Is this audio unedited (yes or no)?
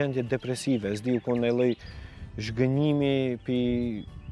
yes